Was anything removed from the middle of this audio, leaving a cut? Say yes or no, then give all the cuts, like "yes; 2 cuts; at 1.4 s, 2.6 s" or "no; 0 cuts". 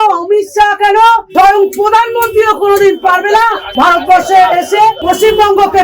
yes; 3 cuts; at 1.3 s, 3.6 s, 5.0 s